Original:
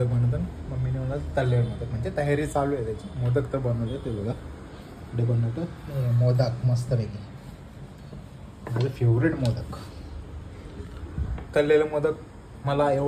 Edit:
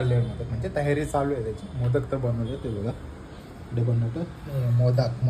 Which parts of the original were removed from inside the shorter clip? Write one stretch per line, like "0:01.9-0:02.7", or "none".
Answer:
none